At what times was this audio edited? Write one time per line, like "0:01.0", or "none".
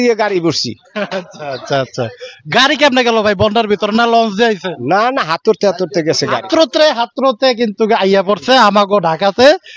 none